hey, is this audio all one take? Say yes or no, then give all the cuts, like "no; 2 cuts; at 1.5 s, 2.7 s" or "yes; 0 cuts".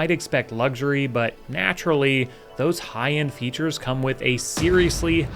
yes; 0 cuts